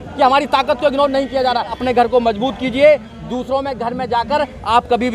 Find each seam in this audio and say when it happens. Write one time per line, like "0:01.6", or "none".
0:01.8